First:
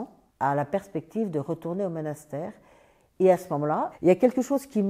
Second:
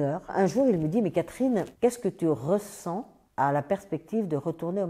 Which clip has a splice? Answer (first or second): second